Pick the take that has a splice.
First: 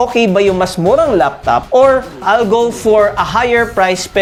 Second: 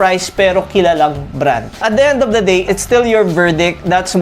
second; 2 cuts; at 1.8 s, 2.7 s

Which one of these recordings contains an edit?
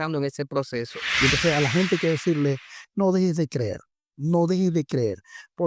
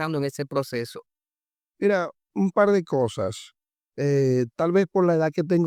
first; 1 cut; at 1.0 s

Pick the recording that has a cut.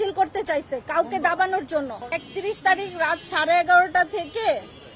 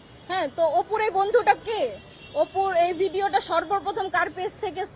first; 1 cut; at 2.1 s

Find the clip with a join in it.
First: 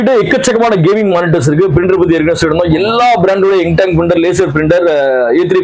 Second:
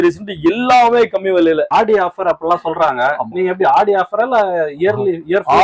second; 1 cut; at 1.7 s

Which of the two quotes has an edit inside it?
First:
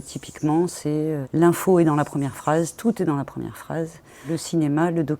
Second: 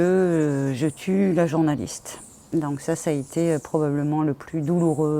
first; 2 cuts; at 1.2 s, 4.2 s

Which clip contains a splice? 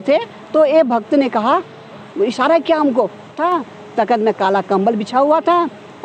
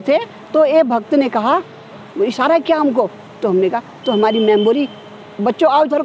first; 1 cut; at 3.3 s

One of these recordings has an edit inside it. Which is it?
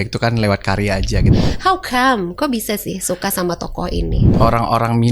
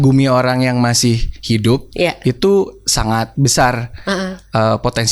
first; 2 cuts; at 1.3 s, 4.2 s

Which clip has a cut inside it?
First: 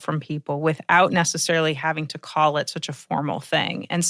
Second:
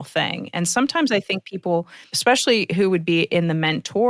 second; 1 cut; at 2.0 s

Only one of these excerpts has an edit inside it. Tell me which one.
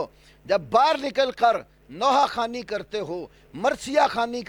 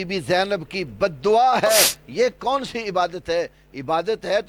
second; 1 cut; at 2.0 s

